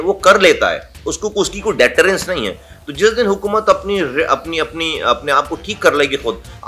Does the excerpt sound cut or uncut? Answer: uncut